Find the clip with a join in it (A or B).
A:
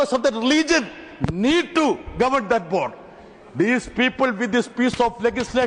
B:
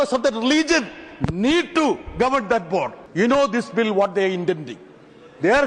B